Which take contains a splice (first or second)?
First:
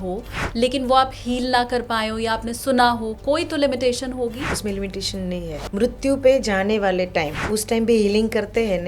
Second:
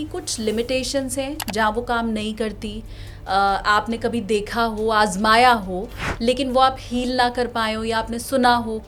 first